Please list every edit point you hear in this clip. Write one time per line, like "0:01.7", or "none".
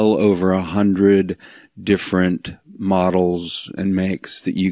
none

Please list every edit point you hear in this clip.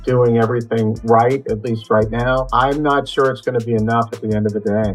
0:02.5

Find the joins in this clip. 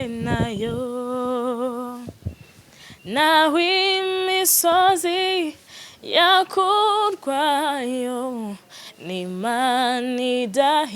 none

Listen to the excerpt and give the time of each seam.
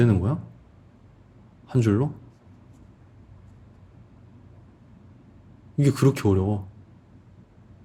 none

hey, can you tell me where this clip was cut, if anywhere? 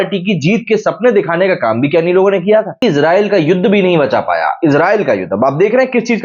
0:02.8

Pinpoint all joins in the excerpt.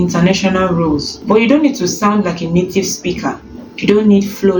none

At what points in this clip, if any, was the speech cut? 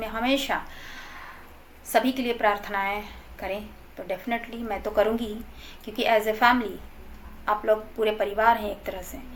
none

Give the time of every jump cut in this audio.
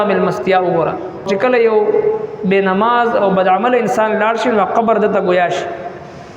0:01.3

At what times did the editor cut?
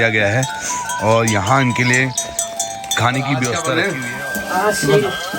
0:03.7

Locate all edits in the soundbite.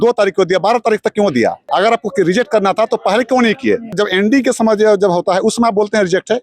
0:01.6
0:04.0

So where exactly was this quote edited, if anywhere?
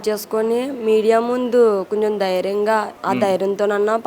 0:02.9

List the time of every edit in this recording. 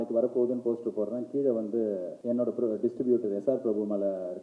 0:02.1

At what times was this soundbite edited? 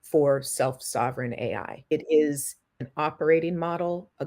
0:01.7
0:02.7

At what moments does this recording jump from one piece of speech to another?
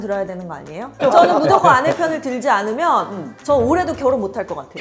0:01.0

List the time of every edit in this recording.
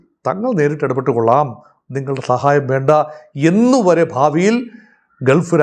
none

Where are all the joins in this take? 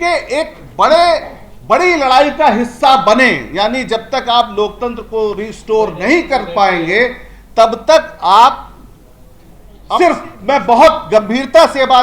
0:10.0

